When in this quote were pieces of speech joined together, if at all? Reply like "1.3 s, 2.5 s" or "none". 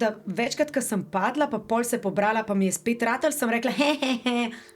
none